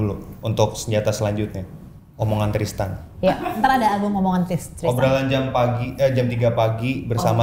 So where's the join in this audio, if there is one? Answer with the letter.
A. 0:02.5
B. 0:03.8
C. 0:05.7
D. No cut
D